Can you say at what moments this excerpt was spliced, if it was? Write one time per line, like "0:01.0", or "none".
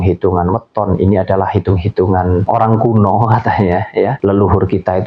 0:02.5
0:04.2